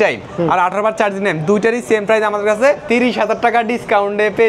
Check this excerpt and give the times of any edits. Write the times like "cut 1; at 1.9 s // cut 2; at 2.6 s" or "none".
cut 1; at 2.8 s